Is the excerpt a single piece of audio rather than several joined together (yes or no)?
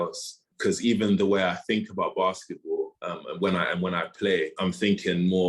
yes